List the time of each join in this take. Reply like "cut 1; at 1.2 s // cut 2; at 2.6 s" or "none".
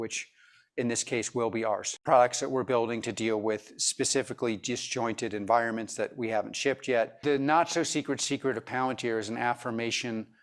cut 1; at 1.9 s // cut 2; at 7.1 s